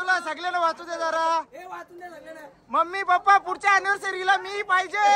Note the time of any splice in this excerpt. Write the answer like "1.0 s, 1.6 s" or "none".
none